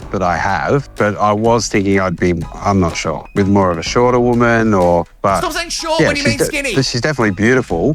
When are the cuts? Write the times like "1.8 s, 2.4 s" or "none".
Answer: none